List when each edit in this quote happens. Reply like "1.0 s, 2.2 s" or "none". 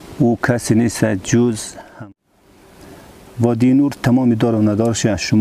2.0 s